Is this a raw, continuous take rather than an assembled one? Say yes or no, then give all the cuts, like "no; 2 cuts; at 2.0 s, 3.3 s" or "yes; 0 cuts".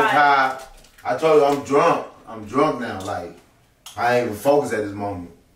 yes; 0 cuts